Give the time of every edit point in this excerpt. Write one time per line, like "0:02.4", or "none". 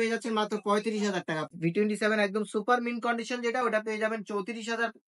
0:01.5